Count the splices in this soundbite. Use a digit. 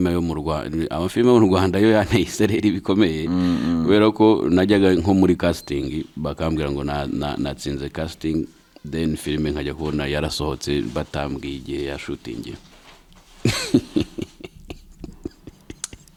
0